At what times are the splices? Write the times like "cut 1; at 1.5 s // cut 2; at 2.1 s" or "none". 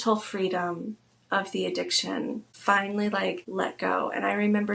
cut 1; at 2.5 s // cut 2; at 3.4 s